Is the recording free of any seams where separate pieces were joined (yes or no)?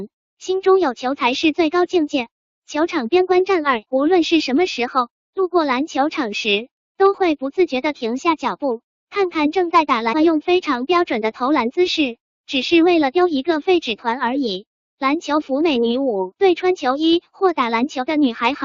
yes